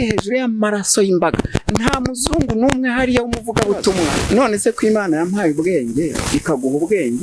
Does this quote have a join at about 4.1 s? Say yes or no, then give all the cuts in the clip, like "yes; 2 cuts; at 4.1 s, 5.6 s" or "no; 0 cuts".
yes; 1 cut; at 4.1 s